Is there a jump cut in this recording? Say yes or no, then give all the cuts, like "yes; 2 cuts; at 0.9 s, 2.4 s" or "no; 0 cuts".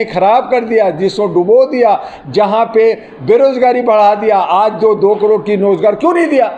no; 0 cuts